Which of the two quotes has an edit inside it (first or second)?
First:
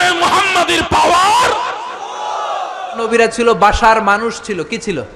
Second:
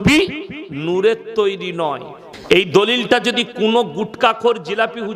first